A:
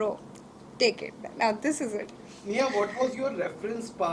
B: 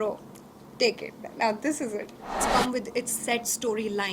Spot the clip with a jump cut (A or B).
B